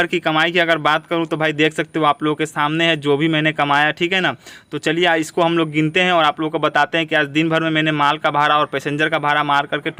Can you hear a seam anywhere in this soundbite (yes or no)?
no